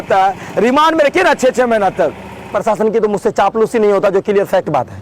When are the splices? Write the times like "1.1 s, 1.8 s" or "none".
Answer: 2.5 s